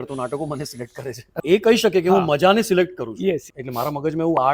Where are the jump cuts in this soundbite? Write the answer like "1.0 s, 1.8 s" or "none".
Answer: 1.4 s, 3.5 s